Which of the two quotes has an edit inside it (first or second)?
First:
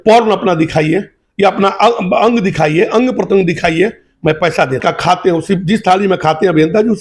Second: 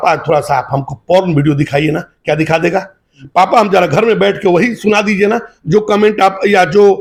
first